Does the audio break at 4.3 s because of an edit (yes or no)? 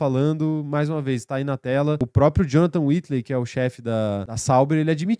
yes